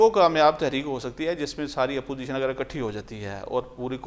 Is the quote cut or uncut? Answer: uncut